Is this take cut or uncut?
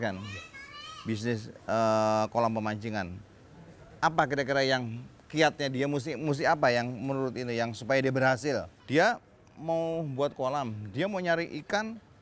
cut